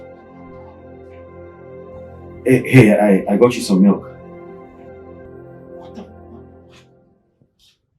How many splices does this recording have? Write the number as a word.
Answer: zero